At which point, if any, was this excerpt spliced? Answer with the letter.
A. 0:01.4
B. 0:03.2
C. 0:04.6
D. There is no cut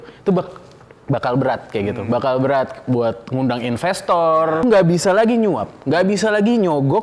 C